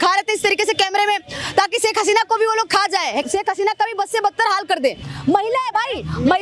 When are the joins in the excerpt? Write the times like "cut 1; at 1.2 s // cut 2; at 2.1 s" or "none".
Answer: cut 1; at 3.3 s // cut 2; at 5.1 s